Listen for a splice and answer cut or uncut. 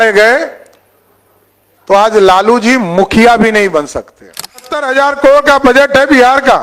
cut